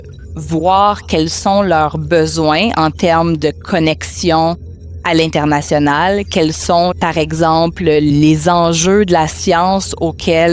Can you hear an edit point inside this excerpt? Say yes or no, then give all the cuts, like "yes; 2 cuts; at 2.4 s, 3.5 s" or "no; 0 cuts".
yes; 2 cuts; at 7.0 s, 8.1 s